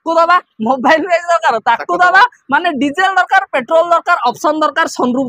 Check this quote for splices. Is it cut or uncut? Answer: uncut